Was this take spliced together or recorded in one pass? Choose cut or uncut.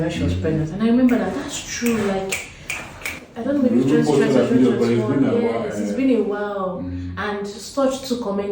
uncut